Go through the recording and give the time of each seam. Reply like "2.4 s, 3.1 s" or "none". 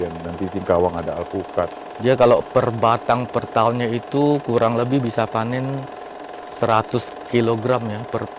1.8 s